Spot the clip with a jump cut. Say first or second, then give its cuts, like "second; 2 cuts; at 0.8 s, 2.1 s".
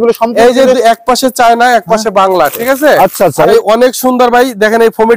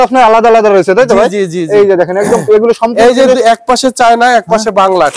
first; 1 cut; at 3.5 s